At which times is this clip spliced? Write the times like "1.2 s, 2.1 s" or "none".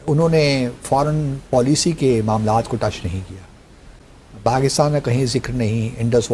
none